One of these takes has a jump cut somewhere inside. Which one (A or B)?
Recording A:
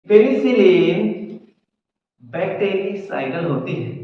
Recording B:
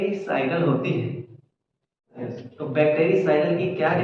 B